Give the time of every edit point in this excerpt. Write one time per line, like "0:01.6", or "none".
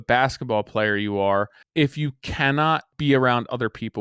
0:01.6
0:02.9